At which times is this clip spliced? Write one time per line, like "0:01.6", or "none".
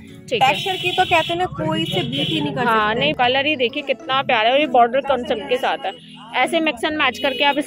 0:03.1